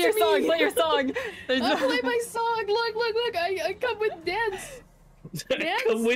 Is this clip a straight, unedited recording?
yes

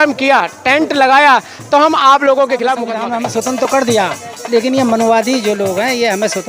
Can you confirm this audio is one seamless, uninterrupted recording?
no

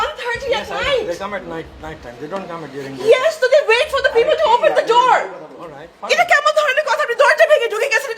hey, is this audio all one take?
yes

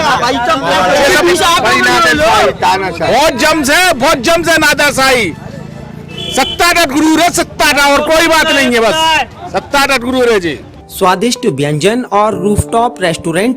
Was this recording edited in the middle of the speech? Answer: yes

